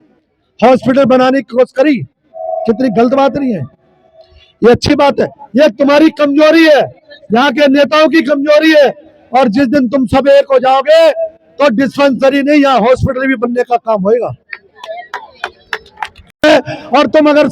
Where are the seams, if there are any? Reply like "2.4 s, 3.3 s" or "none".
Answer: 16.4 s